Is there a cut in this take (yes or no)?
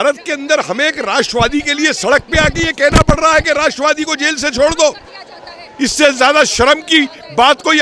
no